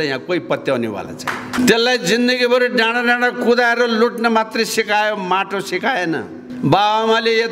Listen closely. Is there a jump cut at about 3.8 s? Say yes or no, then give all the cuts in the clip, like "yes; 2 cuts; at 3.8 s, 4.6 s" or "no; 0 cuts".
no; 2 cuts; at 1.6 s, 6.4 s